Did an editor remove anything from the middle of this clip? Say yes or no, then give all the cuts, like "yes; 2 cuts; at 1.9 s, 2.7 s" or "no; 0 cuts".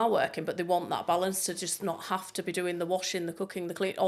no; 0 cuts